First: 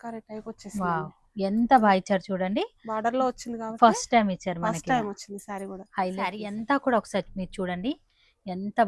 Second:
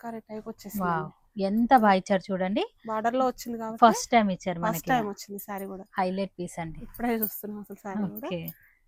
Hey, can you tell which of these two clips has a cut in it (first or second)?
first